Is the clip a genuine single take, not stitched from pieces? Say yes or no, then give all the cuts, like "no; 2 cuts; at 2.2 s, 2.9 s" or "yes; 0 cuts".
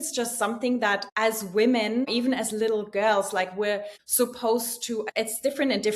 no; 4 cuts; at 1.1 s, 2.1 s, 4.0 s, 5.0 s